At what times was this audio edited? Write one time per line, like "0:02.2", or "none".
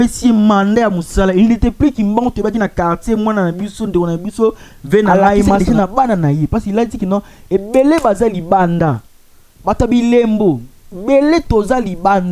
0:05.6